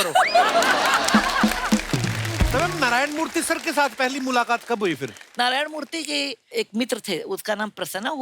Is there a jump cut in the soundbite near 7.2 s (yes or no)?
no